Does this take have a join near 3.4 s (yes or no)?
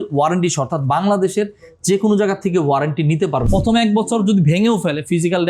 yes